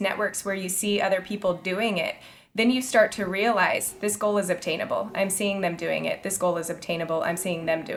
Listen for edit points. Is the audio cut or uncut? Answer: uncut